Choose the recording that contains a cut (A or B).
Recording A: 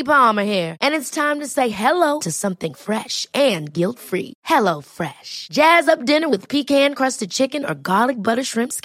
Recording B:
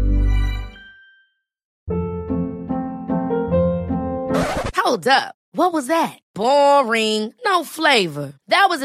B